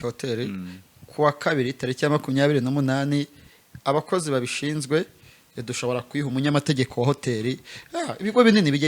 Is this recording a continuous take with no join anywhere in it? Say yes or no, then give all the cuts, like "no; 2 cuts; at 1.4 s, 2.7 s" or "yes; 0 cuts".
yes; 0 cuts